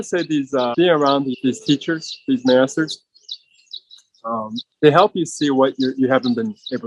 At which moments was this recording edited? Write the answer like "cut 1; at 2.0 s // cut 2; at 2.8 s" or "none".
cut 1; at 0.7 s // cut 2; at 1.4 s